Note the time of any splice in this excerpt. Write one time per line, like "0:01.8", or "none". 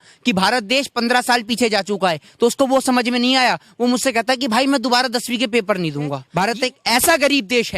0:06.2